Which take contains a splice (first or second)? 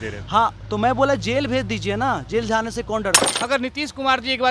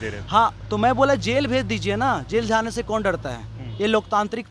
first